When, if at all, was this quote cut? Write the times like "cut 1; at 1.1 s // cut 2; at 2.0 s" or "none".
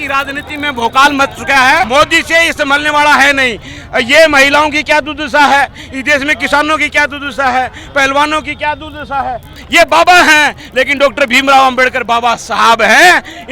cut 1; at 1.9 s // cut 2; at 9.6 s